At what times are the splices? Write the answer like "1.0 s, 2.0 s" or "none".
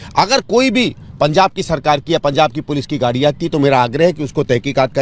none